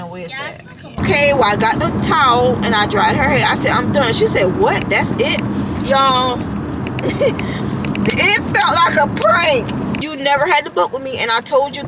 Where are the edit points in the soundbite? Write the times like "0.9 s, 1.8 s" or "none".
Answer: 1.0 s, 10.0 s